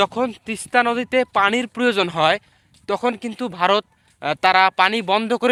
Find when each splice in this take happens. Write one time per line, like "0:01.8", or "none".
none